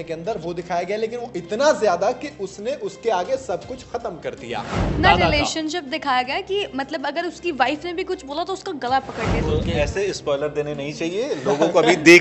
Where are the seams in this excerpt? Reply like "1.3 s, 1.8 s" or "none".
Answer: 4.9 s, 9.4 s